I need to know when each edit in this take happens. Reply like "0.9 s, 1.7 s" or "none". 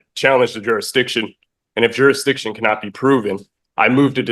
none